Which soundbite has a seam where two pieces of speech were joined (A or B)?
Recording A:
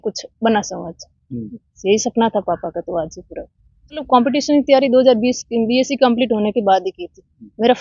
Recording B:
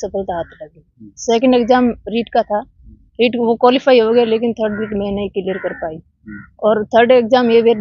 A